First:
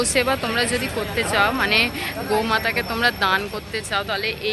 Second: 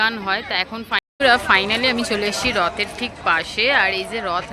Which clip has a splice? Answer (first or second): second